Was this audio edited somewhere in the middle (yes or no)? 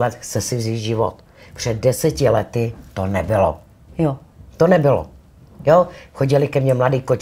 no